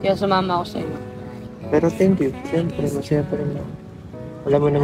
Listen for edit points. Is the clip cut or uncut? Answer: uncut